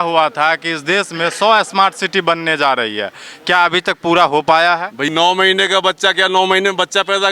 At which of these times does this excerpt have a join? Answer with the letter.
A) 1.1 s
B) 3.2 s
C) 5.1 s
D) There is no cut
C